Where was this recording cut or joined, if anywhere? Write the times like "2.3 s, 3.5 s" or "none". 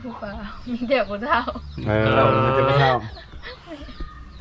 none

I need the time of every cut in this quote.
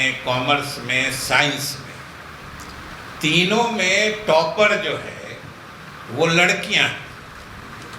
none

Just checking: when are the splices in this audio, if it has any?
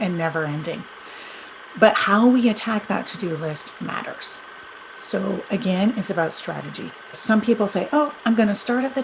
7.1 s

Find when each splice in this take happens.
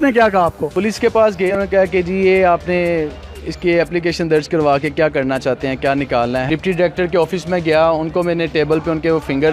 1.5 s, 6.4 s

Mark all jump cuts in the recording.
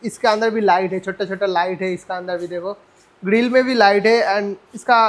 none

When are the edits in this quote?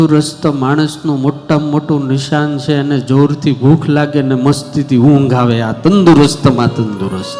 none

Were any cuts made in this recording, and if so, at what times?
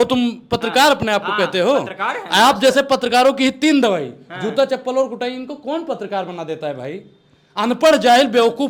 none

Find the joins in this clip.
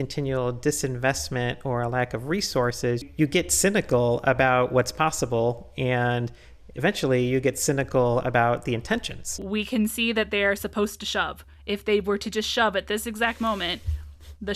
3.1 s, 9.4 s

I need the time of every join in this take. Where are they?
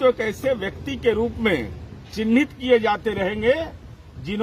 none

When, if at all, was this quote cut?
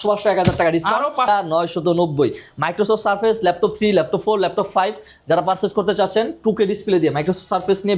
1.3 s

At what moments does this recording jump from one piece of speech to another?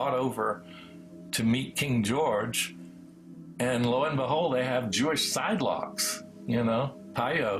none

